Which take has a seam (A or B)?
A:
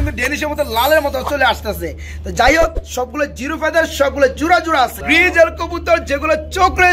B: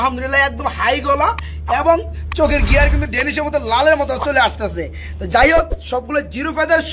A